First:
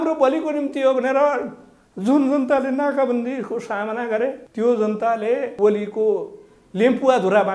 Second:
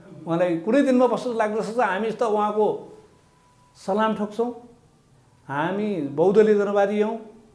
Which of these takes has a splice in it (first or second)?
first